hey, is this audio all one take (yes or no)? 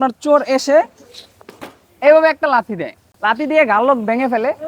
yes